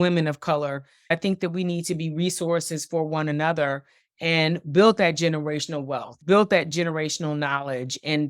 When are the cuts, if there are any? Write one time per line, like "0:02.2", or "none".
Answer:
0:01.1
0:06.1

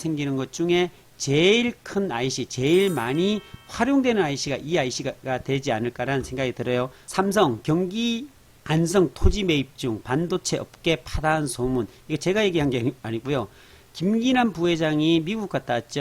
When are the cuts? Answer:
0:07.0

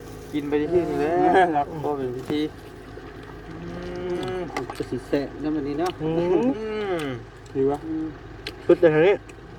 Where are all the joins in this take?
none

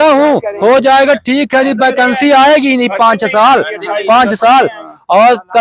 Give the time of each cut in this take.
none

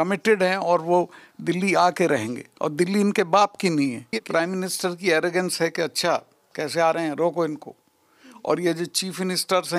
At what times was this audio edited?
0:04.2

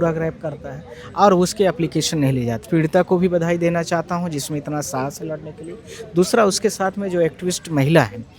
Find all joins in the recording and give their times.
0:02.6

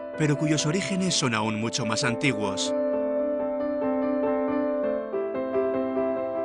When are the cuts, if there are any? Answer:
0:02.5

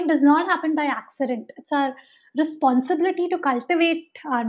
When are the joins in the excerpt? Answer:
none

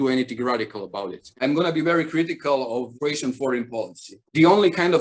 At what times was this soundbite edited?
0:01.3
0:04.1

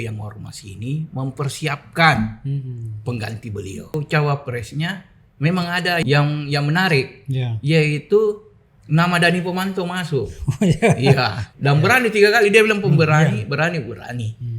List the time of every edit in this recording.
0:03.9
0:06.0
0:11.4

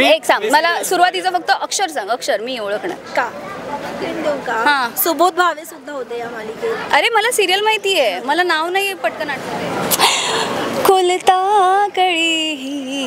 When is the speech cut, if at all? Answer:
0:04.1
0:09.4

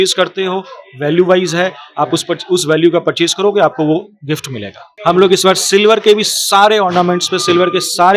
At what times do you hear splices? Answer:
0:04.9

